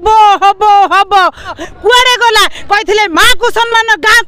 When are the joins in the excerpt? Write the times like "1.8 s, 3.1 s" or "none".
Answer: 1.6 s